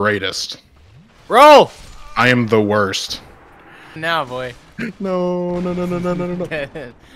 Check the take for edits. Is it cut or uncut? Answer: cut